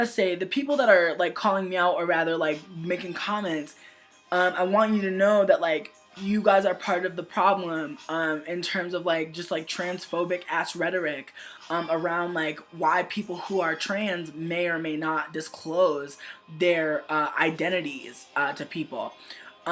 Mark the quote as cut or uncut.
cut